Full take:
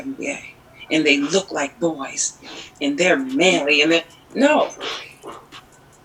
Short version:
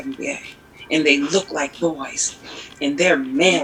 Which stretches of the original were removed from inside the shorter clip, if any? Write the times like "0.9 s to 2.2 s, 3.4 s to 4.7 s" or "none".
none